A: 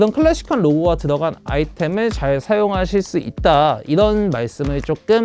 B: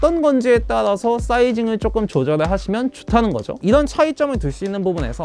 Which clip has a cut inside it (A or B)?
B